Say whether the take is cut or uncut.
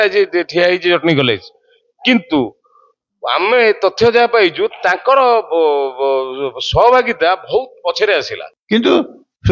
cut